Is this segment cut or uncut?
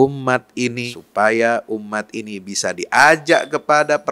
cut